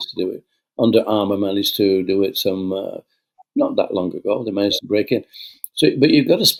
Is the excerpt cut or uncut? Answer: uncut